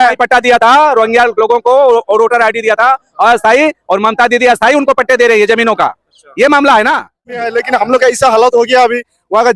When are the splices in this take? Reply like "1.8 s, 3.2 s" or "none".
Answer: 7.5 s